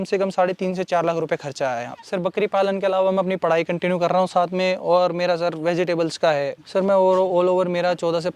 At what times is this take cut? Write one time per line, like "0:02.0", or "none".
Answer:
0:01.9
0:06.6